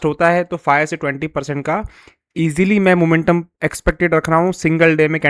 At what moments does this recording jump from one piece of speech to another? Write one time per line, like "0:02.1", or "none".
none